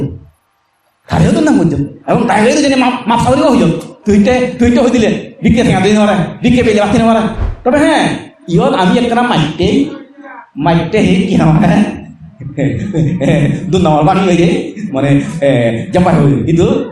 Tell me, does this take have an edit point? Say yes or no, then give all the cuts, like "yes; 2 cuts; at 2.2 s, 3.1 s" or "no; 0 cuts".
yes; 1 cut; at 7.5 s